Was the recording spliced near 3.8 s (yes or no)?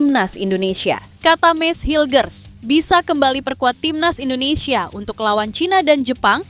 no